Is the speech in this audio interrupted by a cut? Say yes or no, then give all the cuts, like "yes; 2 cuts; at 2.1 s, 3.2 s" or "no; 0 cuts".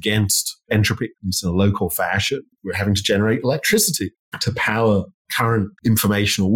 yes; 2 cuts; at 2.5 s, 5.4 s